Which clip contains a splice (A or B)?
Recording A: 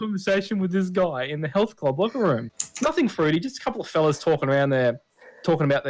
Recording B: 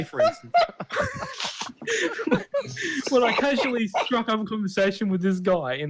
A